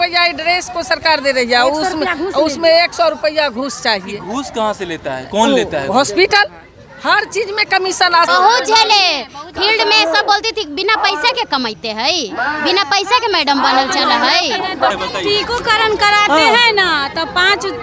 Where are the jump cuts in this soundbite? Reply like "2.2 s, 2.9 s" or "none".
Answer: 8.2 s, 14.9 s